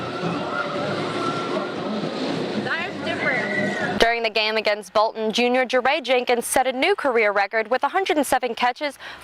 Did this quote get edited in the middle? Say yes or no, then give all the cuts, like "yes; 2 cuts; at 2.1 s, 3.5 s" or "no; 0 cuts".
yes; 1 cut; at 4.0 s